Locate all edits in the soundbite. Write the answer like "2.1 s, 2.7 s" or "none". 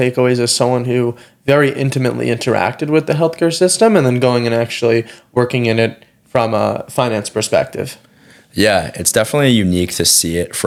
none

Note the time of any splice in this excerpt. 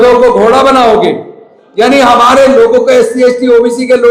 none

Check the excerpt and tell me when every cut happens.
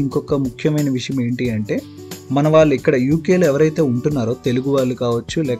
none

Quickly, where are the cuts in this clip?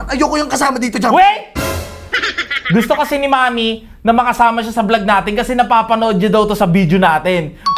none

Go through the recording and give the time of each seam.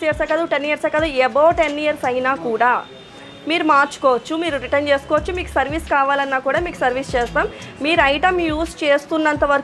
none

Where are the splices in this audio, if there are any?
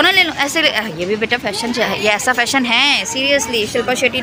none

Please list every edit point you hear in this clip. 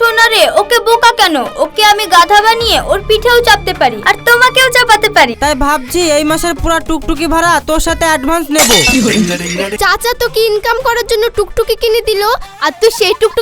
5.4 s, 9.7 s

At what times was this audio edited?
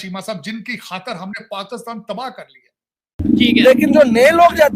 3.2 s

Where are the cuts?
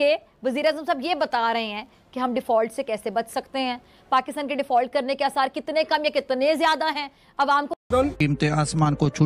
7.8 s

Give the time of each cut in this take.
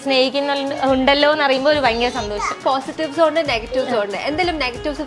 2.6 s

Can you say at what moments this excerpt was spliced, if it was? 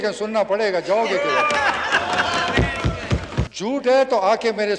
3.5 s

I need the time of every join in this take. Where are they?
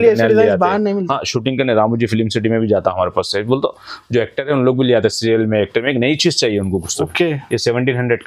none

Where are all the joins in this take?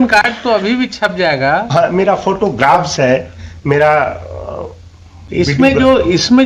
none

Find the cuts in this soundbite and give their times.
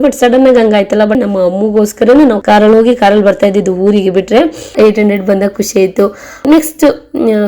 1.1 s, 2.4 s, 4.7 s, 6.5 s

